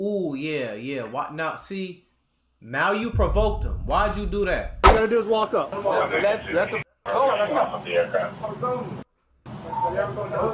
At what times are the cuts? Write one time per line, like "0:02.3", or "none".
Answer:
0:04.8